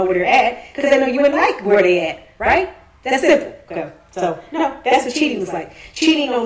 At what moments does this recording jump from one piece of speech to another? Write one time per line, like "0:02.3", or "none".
0:02.2

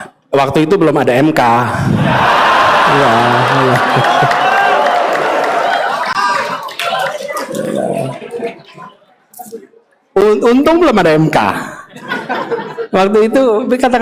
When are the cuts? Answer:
none

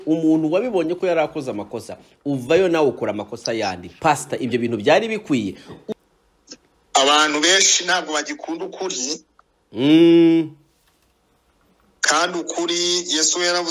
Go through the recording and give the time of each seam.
0:05.9

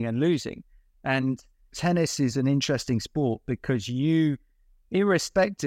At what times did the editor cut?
0:01.8

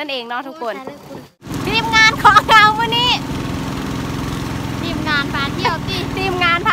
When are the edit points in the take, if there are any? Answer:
0:01.5

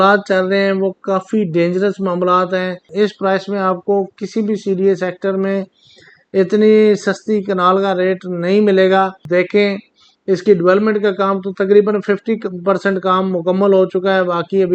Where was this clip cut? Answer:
0:02.9
0:09.3

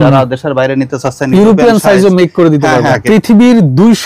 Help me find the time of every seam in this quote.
0:03.0

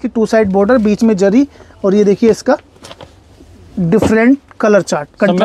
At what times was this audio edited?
none

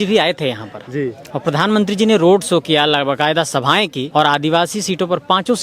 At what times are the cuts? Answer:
0:04.0

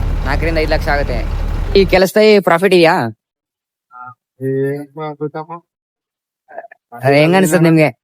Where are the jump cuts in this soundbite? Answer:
0:01.5

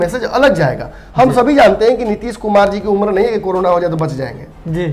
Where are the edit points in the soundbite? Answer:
none

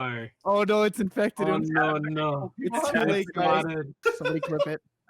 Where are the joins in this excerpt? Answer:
0:03.9

